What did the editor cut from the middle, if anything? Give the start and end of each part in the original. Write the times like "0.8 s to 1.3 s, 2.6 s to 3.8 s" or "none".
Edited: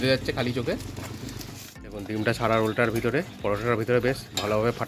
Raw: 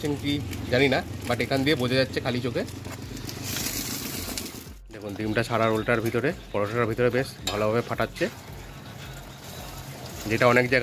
3.4 s to 4.7 s